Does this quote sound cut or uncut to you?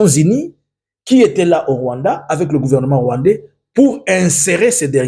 uncut